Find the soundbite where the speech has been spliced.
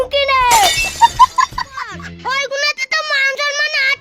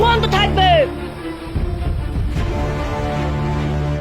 first; 1 cut; at 2.0 s

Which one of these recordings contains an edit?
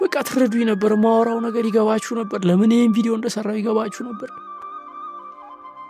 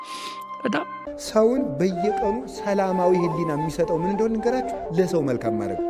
second; 1 cut; at 1.0 s

